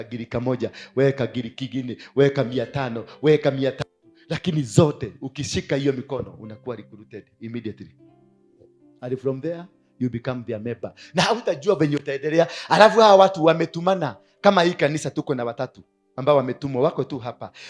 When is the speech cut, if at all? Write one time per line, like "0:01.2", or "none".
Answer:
none